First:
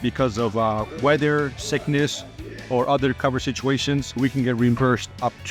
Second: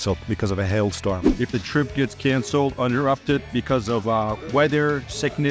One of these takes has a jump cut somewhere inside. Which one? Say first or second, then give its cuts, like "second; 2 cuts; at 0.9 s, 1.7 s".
second; 1 cut; at 1.3 s